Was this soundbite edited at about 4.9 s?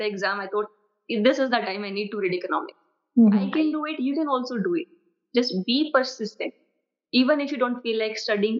no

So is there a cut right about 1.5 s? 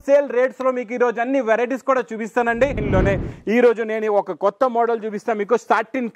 no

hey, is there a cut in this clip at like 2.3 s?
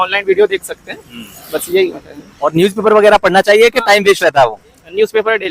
no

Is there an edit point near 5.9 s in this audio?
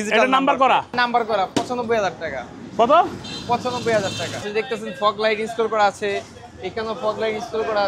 no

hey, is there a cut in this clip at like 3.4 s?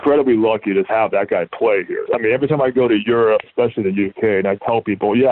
yes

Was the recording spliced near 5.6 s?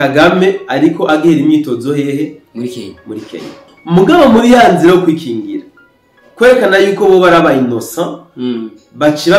no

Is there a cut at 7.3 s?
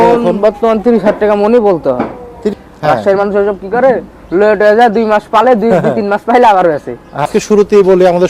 yes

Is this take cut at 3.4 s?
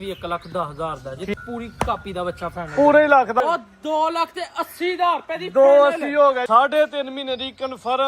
yes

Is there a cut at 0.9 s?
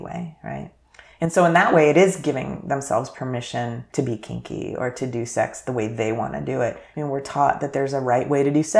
no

